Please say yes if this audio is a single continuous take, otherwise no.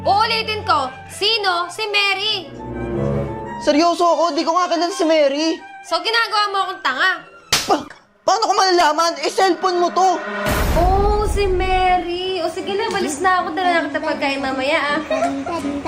yes